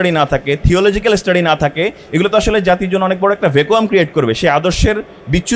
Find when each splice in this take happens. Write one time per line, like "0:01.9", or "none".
none